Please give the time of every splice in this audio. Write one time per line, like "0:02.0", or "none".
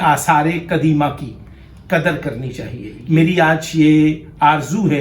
0:02.9